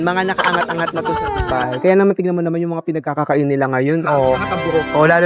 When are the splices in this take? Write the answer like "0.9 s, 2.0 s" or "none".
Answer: none